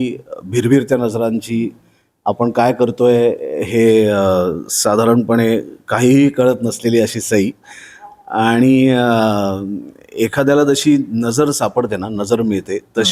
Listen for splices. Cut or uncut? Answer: uncut